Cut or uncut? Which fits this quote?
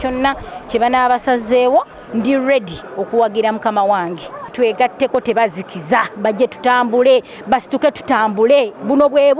cut